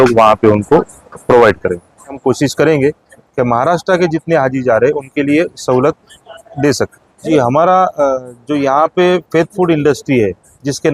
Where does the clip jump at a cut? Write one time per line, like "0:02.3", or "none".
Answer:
0:02.2
0:07.3